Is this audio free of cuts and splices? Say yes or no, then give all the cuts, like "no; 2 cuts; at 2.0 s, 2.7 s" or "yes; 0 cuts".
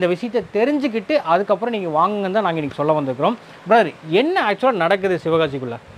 yes; 0 cuts